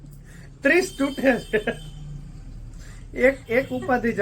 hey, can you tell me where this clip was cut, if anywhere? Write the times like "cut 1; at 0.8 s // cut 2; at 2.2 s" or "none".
cut 1; at 1.9 s